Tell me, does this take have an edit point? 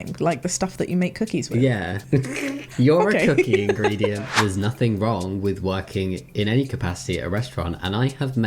yes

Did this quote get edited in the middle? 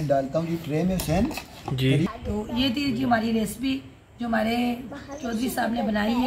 yes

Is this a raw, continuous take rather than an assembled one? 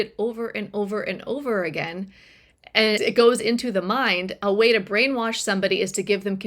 no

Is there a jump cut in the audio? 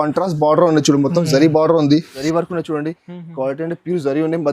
yes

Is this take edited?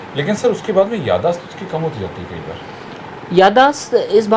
no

